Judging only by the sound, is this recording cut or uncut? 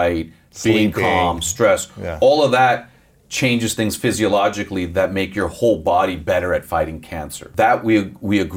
cut